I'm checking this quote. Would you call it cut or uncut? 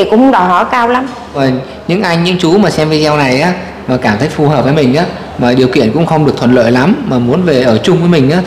cut